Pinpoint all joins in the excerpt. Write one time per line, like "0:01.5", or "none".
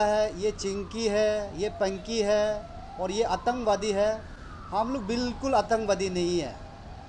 none